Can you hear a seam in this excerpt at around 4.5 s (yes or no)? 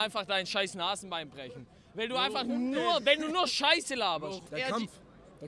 yes